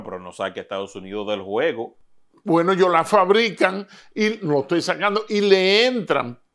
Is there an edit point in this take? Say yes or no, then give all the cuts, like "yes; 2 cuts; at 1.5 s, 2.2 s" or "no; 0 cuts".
no; 0 cuts